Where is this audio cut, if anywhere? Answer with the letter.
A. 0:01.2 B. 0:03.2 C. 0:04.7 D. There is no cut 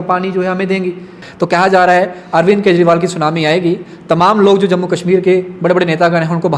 A